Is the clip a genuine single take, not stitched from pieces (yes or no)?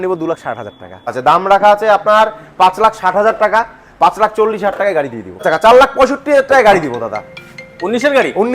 no